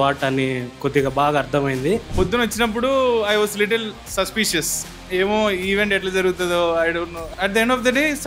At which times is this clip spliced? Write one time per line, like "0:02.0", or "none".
0:02.1
0:07.2

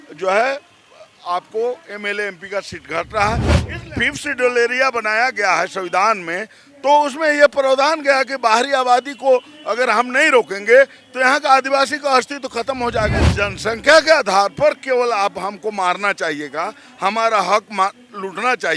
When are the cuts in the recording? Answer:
0:03.7
0:13.3

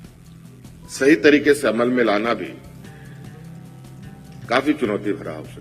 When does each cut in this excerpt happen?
0:02.6
0:04.5

